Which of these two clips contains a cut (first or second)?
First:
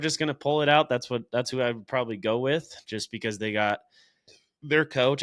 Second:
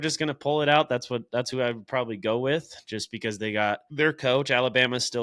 second